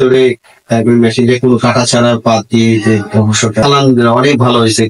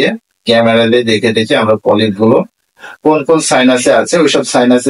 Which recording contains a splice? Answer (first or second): first